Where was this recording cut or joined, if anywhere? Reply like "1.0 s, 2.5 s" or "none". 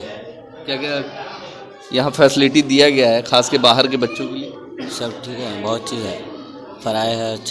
none